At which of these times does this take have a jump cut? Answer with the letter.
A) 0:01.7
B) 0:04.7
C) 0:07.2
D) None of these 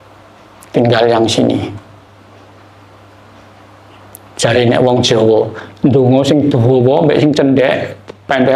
D